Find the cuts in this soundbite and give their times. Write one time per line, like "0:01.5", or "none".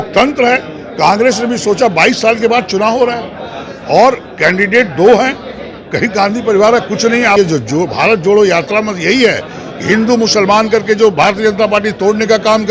0:07.4